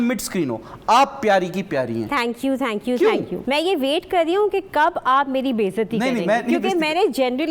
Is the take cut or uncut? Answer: uncut